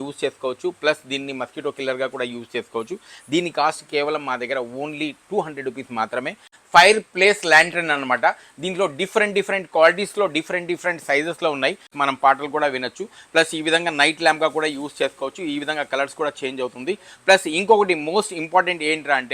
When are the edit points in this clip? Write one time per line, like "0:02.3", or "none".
0:06.5
0:11.9